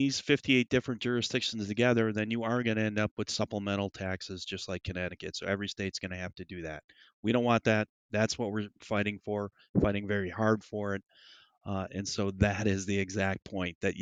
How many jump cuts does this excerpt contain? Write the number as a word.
zero